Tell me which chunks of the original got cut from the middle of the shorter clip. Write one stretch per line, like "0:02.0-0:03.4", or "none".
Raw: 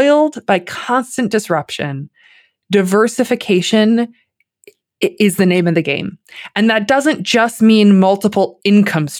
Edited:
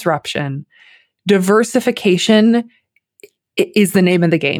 none

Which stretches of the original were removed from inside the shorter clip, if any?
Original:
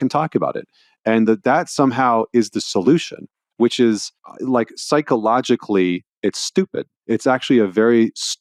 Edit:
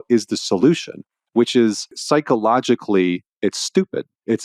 0:04.2-0:04.8

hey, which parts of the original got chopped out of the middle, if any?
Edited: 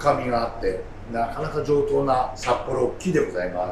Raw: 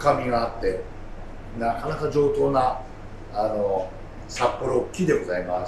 0:00.9-0:01.4
0:02.8-0:04.3

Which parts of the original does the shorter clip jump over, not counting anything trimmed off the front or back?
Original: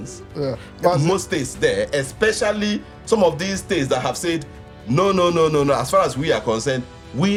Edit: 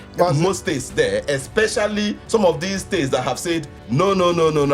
0:02.8-0:03.0
0:04.5-0:04.7

